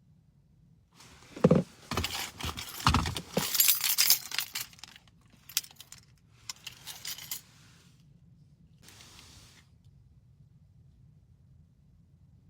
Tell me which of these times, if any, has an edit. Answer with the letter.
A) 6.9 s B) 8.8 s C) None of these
B